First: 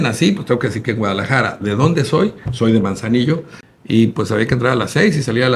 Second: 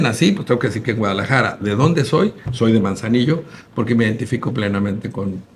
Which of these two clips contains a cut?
first; 1 cut; at 3.6 s

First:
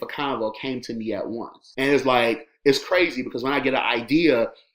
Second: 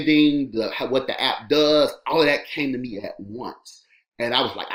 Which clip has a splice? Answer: first; 1 cut; at 1.6 s

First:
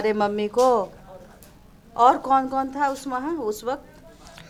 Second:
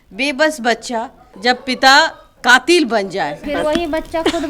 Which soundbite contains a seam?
second; 2 cuts; at 1.2 s, 3.4 s

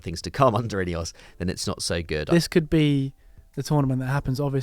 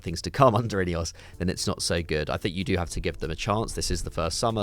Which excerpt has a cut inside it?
first; 1 cut; at 2.2 s

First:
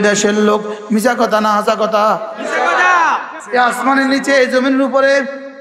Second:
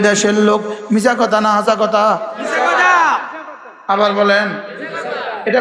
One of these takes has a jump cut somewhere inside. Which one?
first; 1 cut; at 3.4 s

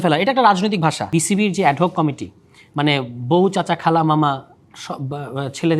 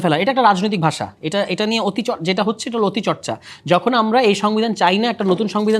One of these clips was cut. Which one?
first; 1 cut; at 1.1 s

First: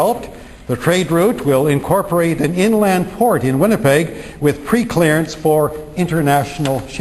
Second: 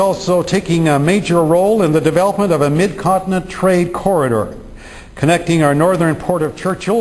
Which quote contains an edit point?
second; 1 cut; at 4.7 s

